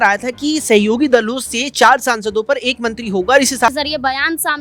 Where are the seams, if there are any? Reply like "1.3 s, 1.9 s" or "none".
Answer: 3.7 s